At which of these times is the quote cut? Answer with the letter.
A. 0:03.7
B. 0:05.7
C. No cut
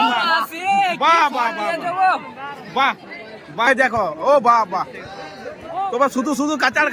A